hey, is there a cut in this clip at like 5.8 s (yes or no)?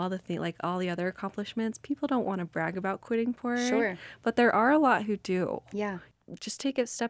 yes